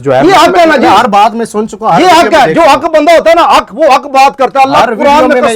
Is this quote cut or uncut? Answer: uncut